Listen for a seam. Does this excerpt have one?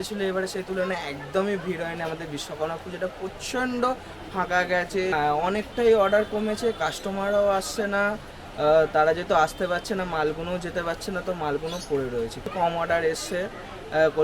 yes; 2 cuts; at 5.1 s, 12.5 s

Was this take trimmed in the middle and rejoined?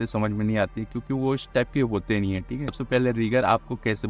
yes; 1 cut; at 2.8 s

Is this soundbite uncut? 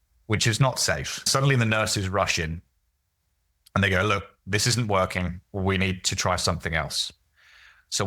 no; 1 cut; at 1.3 s

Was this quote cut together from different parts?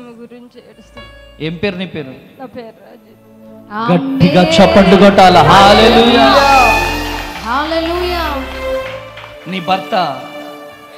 no; 0 cuts

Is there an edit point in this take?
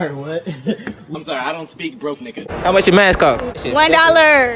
yes; 2 cuts; at 2.5 s, 3.6 s

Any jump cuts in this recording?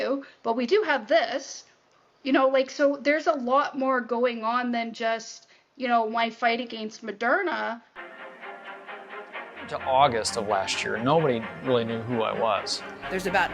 yes; 1 cut; at 8.2 s

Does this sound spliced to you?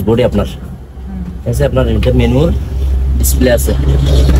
no; 0 cuts

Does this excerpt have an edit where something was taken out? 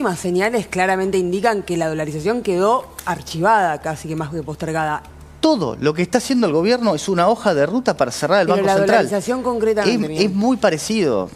yes; 1 cut; at 5.1 s

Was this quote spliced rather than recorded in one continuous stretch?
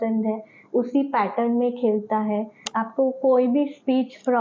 yes; 1 cut; at 2.5 s

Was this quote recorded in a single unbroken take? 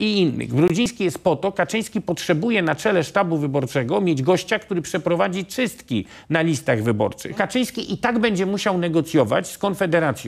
no; 1 cut; at 7.4 s

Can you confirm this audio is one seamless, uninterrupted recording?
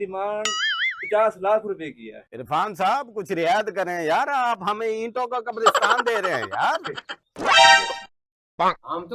yes; 0 cuts

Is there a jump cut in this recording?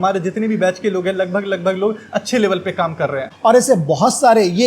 yes; 1 cut; at 3.3 s

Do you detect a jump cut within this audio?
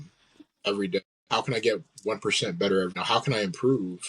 yes; 2 cuts; at 1.2 s, 3.0 s

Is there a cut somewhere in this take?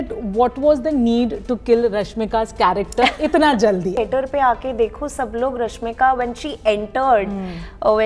yes; 1 cut; at 4.0 s

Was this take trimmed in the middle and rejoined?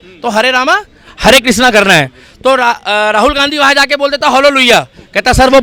no; 0 cuts

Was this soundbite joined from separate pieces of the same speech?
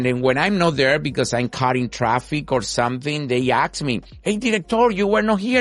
yes; 1 cut; at 4.1 s

